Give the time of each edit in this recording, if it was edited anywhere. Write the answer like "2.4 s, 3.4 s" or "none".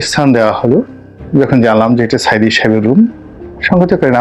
none

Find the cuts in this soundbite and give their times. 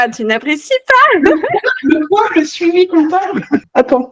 none

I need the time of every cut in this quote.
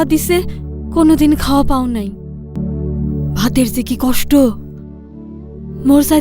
2.5 s

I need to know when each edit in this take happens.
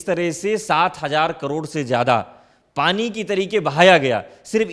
none

